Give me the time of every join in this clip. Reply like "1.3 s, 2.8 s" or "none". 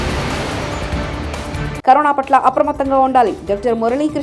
1.8 s